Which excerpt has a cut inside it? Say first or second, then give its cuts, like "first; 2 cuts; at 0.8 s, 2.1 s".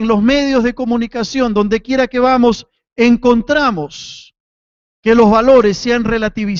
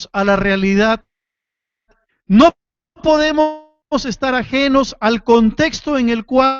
second; 1 cut; at 5.5 s